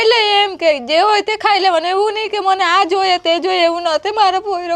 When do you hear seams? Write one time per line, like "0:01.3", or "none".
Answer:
none